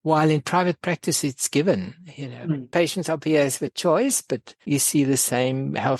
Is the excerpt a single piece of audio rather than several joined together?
yes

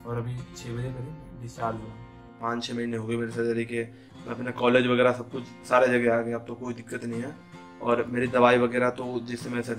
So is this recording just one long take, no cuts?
no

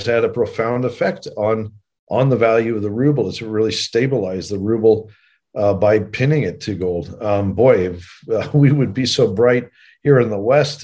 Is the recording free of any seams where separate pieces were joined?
yes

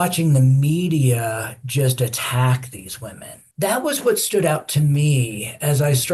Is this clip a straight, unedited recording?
no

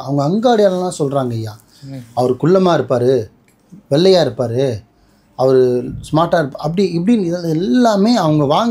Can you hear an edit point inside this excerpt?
no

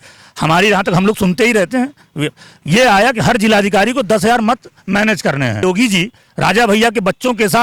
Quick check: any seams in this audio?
yes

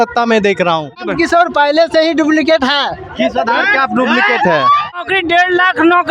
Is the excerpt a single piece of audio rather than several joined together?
no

